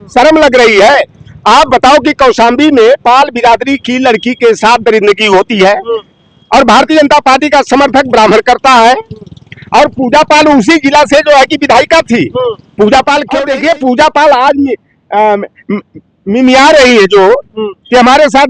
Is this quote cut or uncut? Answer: cut